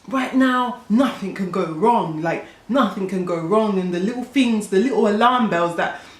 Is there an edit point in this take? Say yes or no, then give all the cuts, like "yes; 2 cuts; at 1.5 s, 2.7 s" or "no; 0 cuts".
no; 0 cuts